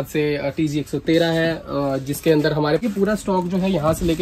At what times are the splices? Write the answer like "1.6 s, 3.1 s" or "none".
2.8 s